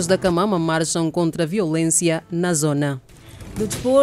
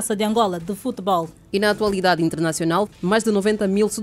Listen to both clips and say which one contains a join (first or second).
second